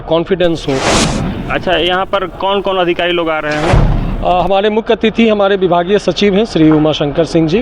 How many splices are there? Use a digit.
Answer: 1